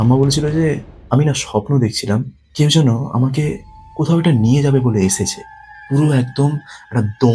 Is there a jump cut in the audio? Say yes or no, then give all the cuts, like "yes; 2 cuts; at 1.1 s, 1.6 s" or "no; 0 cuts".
yes; 2 cuts; at 0.9 s, 2.4 s